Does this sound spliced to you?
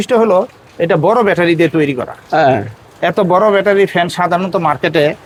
no; 0 cuts

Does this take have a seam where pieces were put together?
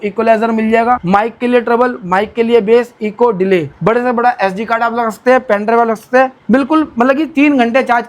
yes; 3 cuts; at 1.0 s, 3.7 s, 6.4 s

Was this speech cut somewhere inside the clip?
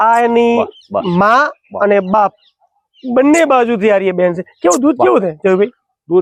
no; 0 cuts

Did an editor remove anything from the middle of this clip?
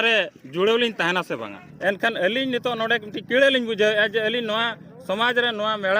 yes; 1 cut; at 1.6 s

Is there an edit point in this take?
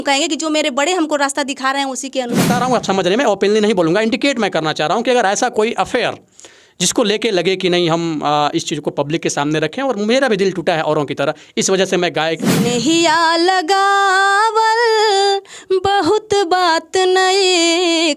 yes; 2 cuts; at 2.5 s, 12.6 s

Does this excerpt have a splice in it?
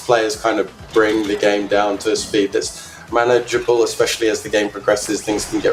no; 0 cuts

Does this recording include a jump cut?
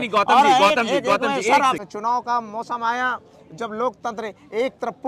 yes; 1 cut; at 1.8 s

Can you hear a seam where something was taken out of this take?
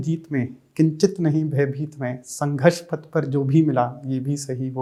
no; 0 cuts

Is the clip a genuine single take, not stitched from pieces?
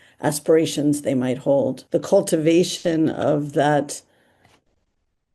no; 1 cut; at 1.8 s

